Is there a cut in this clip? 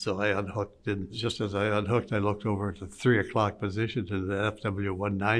yes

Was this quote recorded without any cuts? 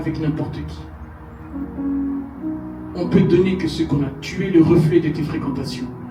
yes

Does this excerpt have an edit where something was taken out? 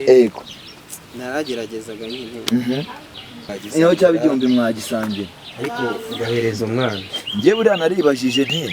yes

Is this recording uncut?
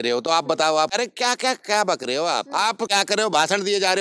no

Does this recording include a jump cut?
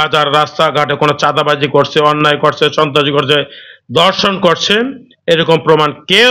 no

